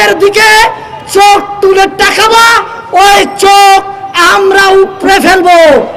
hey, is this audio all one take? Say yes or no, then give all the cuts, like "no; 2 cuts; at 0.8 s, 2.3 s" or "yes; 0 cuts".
yes; 0 cuts